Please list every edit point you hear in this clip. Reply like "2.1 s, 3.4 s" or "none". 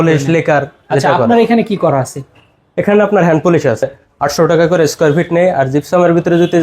3.9 s